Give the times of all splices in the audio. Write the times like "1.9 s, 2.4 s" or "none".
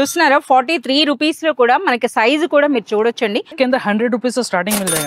3.5 s